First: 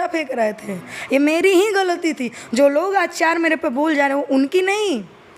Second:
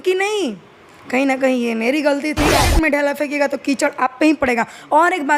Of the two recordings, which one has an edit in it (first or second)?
second